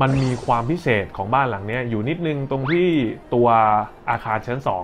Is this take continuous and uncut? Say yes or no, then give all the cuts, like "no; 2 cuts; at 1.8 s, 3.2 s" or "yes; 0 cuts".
yes; 0 cuts